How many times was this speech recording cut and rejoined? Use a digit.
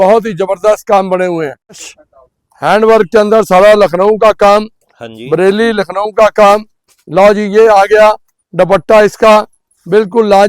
1